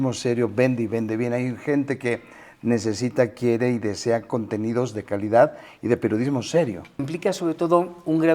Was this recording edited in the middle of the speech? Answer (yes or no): yes